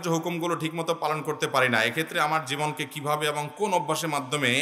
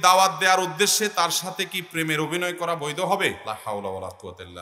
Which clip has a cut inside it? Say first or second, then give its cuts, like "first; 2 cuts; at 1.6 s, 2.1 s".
second; 1 cut; at 3.4 s